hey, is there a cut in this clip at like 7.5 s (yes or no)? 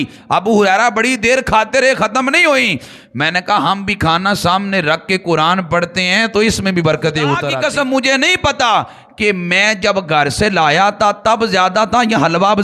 yes